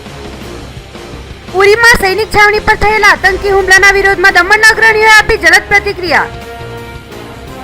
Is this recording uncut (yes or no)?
no